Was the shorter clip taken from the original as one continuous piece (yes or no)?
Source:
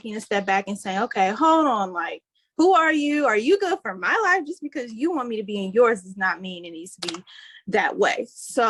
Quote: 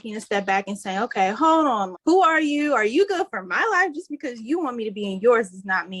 no